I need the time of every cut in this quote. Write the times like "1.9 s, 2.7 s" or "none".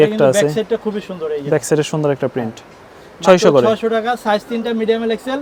none